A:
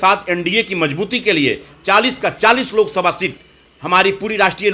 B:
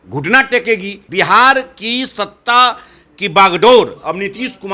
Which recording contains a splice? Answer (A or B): B